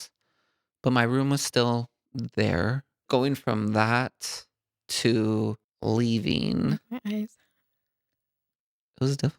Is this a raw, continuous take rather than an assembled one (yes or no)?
no